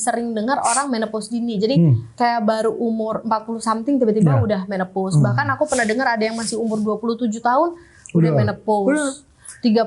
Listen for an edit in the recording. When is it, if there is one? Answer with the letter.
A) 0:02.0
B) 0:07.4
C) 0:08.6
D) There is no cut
A